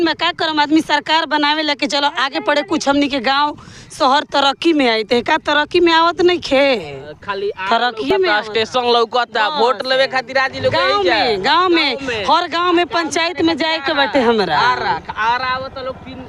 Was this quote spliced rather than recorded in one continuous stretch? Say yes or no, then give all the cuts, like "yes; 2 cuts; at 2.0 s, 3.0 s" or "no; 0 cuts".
no; 0 cuts